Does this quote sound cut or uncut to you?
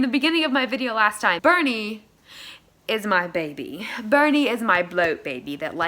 cut